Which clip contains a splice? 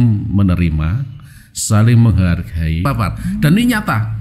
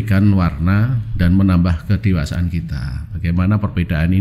first; 1 cut; at 2.9 s

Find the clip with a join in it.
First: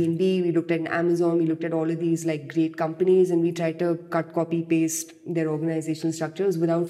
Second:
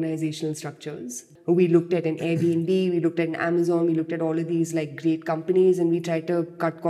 second; 1 cut; at 1.3 s

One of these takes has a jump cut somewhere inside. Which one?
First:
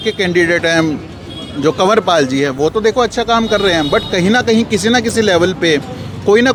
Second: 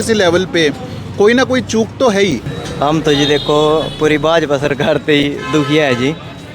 second; 1 cut; at 2.6 s

